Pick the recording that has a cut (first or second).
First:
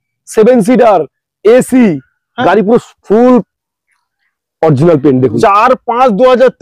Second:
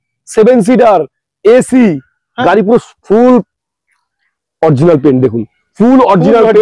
first